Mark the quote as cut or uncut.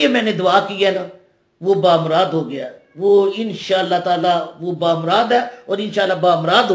uncut